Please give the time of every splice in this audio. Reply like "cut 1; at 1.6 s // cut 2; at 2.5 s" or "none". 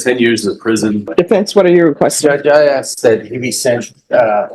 cut 1; at 1.1 s